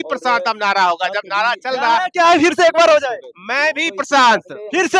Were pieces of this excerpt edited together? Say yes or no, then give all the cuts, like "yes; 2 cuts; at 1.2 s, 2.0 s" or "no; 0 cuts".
no; 0 cuts